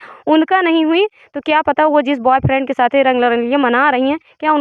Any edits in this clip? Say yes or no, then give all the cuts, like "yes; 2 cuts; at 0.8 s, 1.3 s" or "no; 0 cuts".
no; 0 cuts